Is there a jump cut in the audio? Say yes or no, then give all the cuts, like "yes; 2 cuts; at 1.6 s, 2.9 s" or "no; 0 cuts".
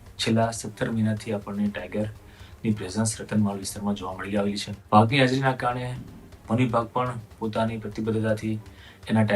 yes; 1 cut; at 4.7 s